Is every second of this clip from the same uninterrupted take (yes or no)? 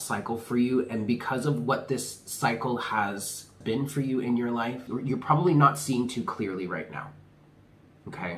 no